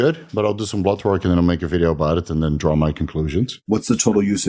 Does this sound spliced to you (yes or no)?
yes